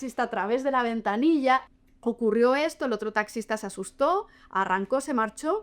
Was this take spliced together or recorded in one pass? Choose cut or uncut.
cut